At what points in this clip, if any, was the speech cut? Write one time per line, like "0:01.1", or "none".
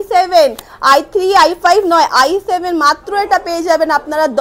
none